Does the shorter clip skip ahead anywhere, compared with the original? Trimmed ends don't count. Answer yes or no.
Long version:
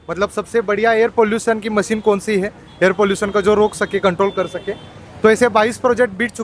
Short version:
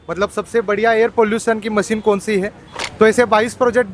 yes